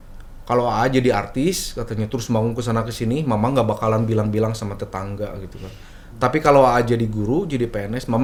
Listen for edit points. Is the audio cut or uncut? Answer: uncut